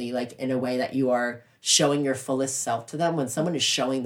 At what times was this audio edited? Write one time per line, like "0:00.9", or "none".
none

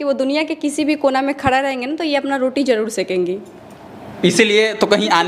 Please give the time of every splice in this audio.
none

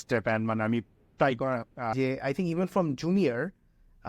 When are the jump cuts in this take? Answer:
0:01.9

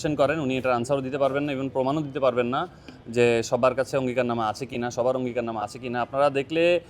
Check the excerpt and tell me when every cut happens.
none

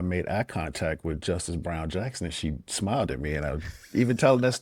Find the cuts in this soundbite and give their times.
none

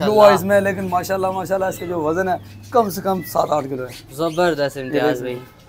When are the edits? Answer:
none

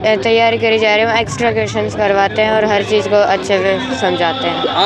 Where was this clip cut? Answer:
none

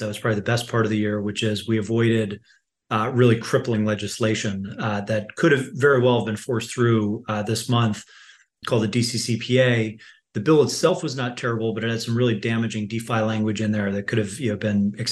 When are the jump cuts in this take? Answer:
none

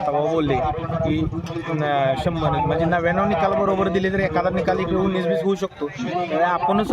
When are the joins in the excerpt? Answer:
none

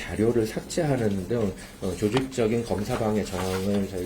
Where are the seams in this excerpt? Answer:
none

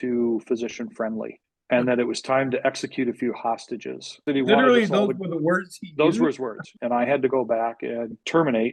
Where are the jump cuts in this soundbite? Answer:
0:06.7

